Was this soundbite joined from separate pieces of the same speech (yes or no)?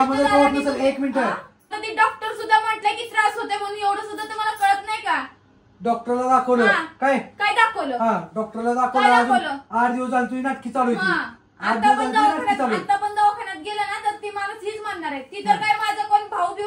yes